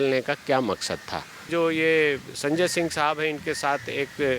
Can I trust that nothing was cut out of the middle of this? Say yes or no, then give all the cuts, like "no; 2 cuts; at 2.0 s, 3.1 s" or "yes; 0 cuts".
no; 1 cut; at 1.5 s